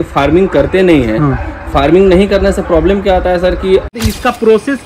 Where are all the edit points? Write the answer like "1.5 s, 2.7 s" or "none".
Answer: 3.9 s